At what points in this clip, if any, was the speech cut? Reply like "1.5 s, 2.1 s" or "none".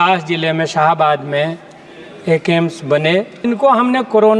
3.4 s